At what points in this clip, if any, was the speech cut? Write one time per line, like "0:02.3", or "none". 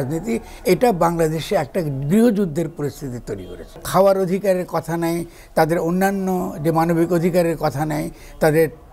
0:03.8